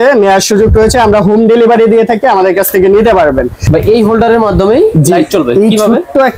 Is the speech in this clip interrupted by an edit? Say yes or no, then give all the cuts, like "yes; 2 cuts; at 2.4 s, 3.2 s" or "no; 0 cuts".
yes; 1 cut; at 3.6 s